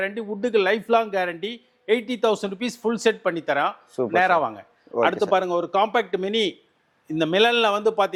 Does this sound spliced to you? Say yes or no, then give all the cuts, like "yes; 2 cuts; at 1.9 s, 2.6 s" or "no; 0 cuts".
no; 0 cuts